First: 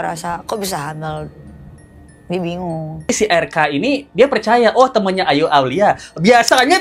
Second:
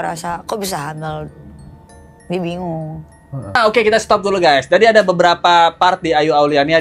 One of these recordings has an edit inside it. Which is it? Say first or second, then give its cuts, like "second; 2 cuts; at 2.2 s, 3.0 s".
first; 1 cut; at 3.1 s